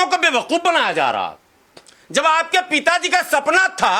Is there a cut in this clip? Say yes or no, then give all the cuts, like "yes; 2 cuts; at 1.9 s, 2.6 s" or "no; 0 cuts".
no; 0 cuts